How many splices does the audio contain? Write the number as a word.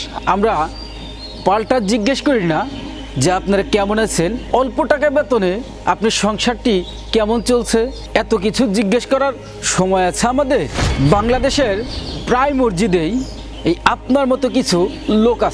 two